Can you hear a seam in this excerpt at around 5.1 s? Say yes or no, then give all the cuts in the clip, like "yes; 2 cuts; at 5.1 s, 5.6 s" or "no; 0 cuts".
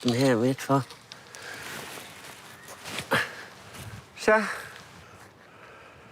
yes; 1 cut; at 5.1 s